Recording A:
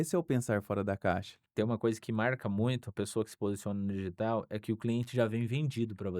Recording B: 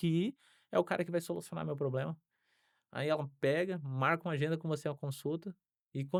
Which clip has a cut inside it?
A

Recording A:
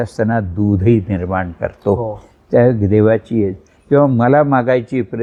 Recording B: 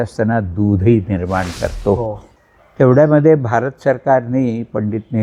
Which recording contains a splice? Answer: B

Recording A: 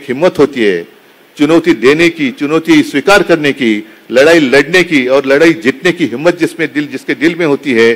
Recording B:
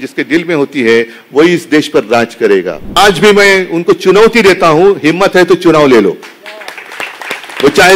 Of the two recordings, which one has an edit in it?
B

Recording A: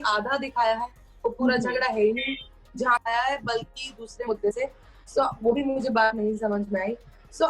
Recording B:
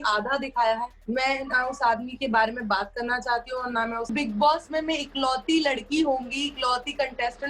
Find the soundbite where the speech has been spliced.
B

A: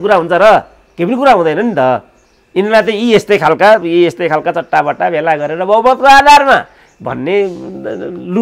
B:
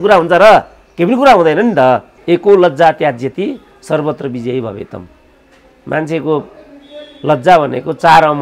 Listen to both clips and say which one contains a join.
B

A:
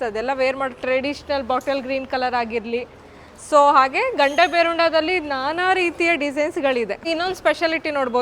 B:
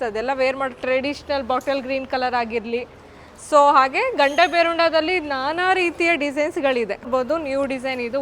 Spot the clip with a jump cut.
A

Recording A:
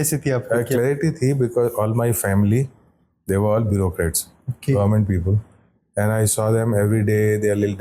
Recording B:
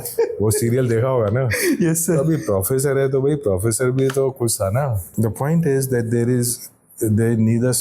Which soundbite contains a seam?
B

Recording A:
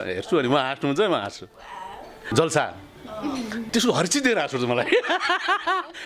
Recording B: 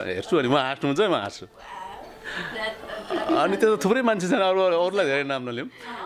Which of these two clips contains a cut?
A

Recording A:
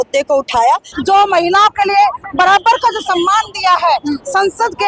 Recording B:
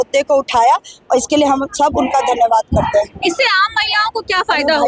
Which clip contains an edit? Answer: A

